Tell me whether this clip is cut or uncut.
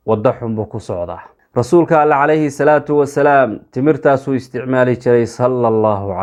uncut